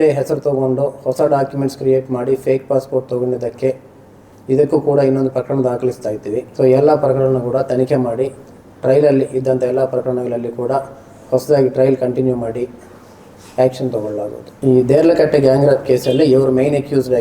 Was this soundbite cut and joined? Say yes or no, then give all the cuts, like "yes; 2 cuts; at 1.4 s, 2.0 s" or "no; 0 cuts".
no; 0 cuts